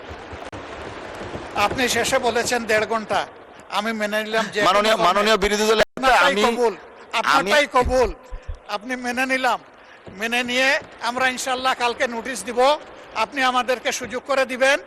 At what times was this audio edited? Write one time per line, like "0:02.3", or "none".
none